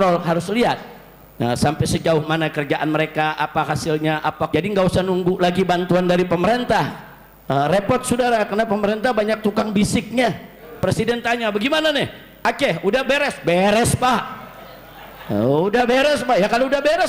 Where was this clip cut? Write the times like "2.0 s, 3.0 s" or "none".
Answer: 4.5 s, 10.8 s

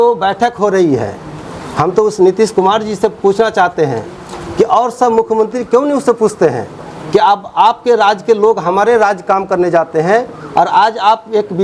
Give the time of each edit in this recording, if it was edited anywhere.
none

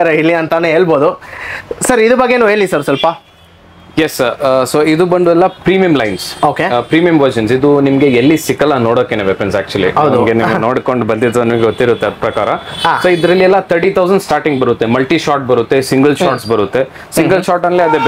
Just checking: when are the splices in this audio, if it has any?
none

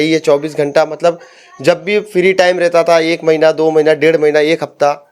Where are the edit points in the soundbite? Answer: none

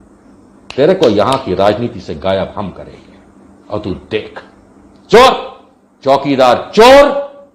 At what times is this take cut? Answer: none

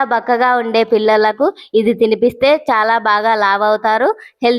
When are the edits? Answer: none

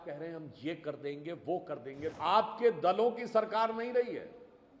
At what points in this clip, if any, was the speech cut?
2.1 s

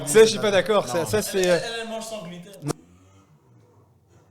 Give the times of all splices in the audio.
2.7 s

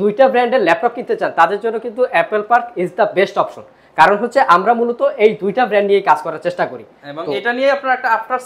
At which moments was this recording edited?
none

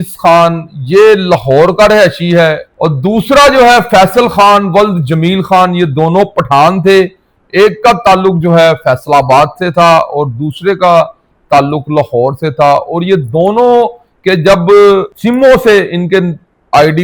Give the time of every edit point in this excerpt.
none

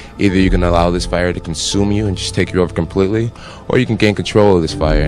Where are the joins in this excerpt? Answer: none

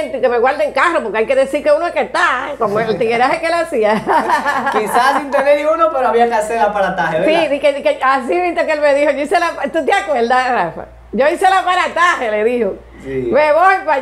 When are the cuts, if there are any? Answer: none

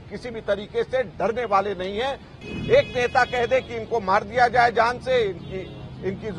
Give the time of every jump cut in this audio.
2.3 s

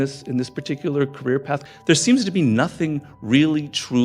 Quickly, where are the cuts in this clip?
1.6 s

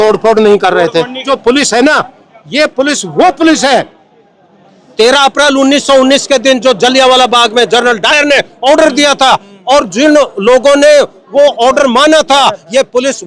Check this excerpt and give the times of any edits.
1.2 s

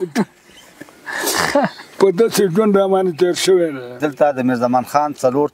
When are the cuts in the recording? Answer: 3.9 s

